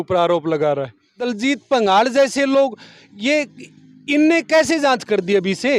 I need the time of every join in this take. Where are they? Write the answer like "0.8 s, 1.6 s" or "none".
1.2 s